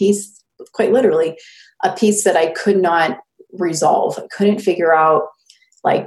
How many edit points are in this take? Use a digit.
0